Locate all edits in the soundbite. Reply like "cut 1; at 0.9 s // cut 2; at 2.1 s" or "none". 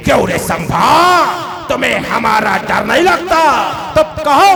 none